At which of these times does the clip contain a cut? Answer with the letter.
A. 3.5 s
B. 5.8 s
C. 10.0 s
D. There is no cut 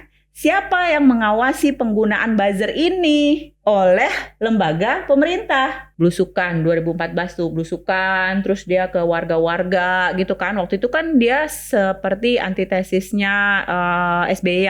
B